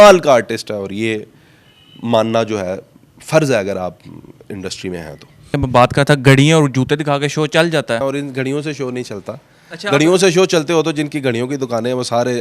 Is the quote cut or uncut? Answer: cut